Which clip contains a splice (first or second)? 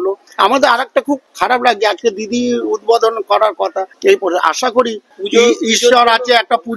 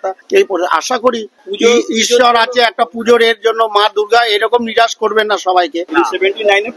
second